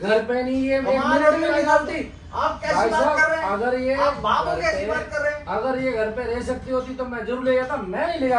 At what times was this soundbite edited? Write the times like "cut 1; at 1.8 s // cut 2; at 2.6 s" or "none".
none